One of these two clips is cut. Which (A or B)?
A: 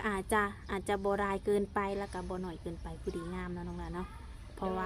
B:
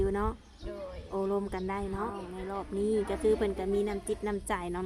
B